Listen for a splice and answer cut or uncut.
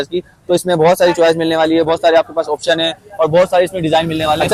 uncut